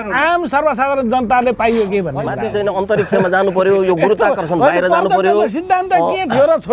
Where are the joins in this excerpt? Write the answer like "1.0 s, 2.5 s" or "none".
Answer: 2.3 s